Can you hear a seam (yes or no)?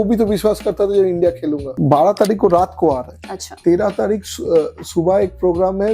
yes